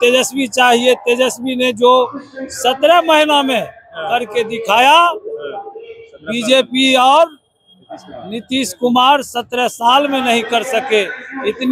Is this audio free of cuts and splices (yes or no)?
yes